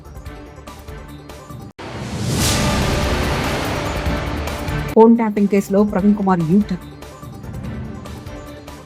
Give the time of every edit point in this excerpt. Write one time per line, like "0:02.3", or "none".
0:01.7